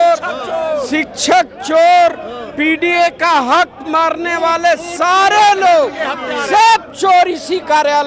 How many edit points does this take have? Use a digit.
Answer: 0